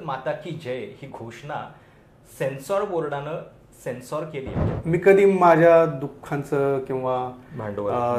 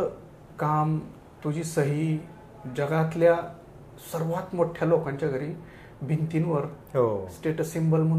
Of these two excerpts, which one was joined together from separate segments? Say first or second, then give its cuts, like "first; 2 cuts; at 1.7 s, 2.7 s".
first; 1 cut; at 4.6 s